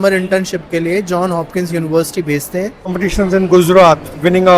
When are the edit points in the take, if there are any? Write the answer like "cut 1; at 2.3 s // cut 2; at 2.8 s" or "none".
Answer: cut 1; at 3.0 s